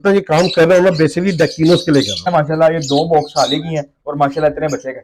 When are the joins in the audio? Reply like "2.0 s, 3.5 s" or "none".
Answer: 2.3 s